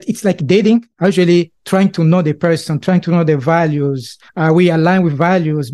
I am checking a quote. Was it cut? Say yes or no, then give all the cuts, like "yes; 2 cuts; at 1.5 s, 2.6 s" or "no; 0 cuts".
no; 0 cuts